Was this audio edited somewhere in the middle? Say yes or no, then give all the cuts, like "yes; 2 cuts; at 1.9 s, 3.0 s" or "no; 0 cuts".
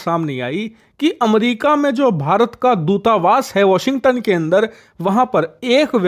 no; 0 cuts